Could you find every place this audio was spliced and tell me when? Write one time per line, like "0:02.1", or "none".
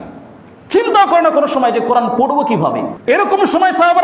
0:02.9